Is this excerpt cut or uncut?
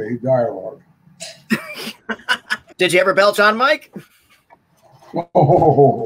cut